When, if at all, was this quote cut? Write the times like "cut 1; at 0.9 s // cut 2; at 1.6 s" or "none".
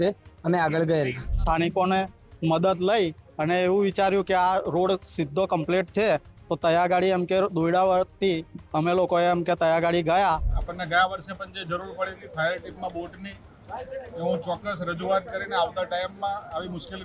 cut 1; at 1.3 s // cut 2; at 10.6 s